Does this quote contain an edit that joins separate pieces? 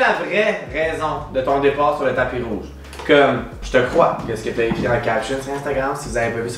no; 0 cuts

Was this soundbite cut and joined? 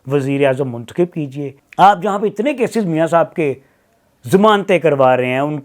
yes; 1 cut; at 1.5 s

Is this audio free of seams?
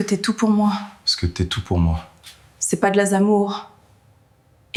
yes; 0 cuts

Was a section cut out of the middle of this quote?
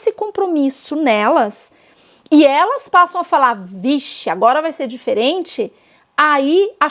no; 0 cuts

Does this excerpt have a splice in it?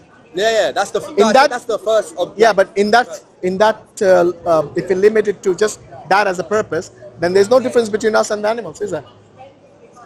yes; 1 cut; at 4.7 s

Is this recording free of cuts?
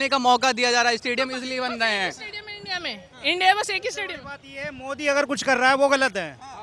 yes; 0 cuts

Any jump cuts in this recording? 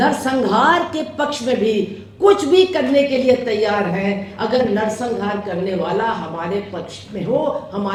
no; 0 cuts

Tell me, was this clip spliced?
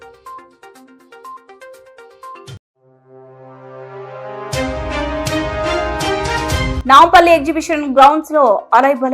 no; 0 cuts

